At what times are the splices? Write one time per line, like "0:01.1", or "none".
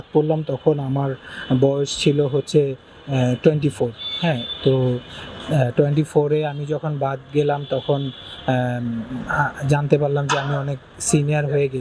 none